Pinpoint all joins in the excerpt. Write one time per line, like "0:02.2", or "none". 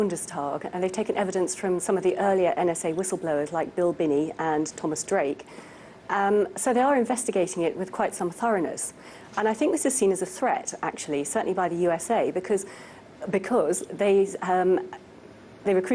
0:06.2